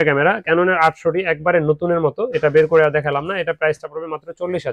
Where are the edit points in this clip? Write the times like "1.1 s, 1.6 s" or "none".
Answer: none